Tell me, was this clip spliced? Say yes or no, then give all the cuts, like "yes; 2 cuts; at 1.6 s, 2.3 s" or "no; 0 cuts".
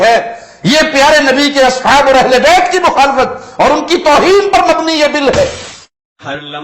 yes; 1 cut; at 5.6 s